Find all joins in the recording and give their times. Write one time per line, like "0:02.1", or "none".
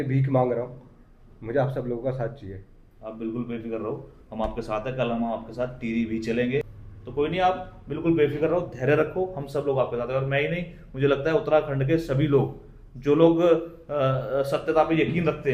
none

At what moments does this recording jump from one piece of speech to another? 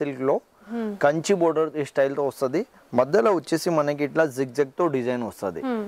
none

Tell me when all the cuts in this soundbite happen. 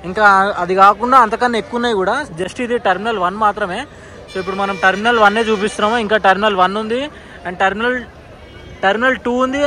none

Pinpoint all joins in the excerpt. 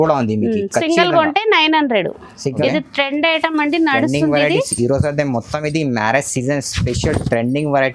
0:02.6

